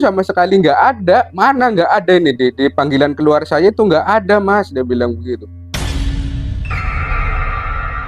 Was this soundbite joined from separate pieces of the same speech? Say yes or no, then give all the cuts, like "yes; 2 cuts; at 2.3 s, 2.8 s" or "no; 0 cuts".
no; 0 cuts